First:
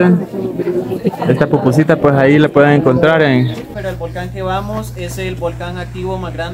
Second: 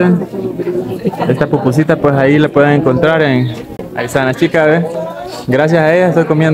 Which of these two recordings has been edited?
first; 1 cut; at 3.8 s

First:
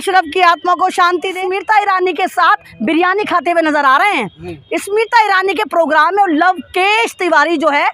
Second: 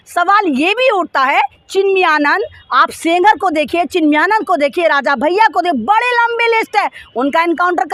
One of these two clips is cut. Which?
first; 1 cut; at 1.4 s

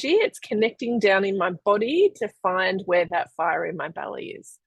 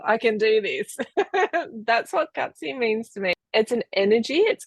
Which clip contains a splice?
second; 1 cut; at 3.4 s

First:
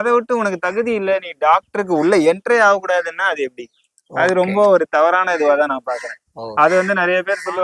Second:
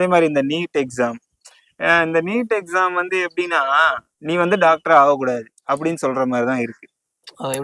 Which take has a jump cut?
second; 1 cut; at 4.1 s

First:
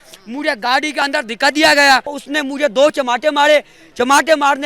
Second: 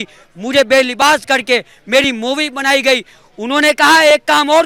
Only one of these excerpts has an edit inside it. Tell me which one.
first; 1 cut; at 2.2 s

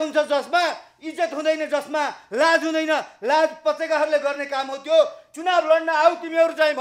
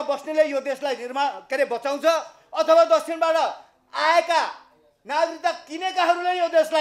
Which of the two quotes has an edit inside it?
first; 1 cut; at 5.2 s

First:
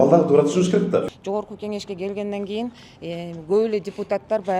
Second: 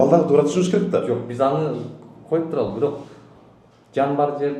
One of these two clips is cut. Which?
first; 1 cut; at 1.1 s

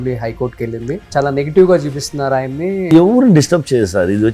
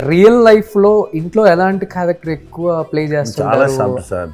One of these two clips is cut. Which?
first; 2 cuts; at 1.1 s, 2.9 s

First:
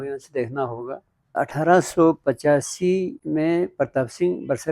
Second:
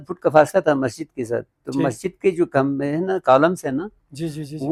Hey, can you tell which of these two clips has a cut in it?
first; 2 cuts; at 1.3 s, 3.2 s

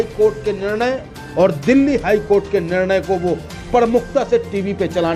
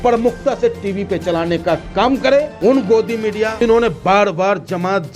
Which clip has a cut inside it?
second; 2 cuts; at 2.5 s, 3.5 s

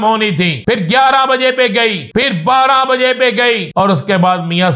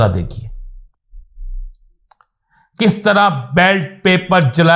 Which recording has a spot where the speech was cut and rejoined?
first; 3 cuts; at 0.8 s, 2.3 s, 3.7 s

